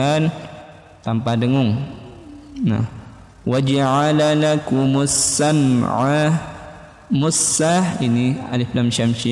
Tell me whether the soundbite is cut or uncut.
uncut